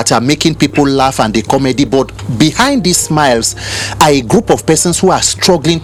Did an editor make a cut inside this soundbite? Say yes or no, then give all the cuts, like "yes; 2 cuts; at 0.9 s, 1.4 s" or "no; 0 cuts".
no; 0 cuts